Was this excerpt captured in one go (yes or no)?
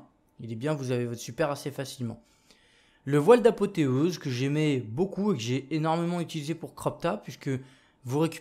no